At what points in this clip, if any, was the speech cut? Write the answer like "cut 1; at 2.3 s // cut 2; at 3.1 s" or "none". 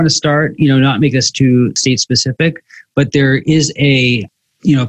cut 1; at 1.8 s